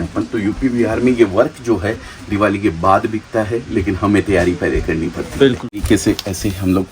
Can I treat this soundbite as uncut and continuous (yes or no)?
no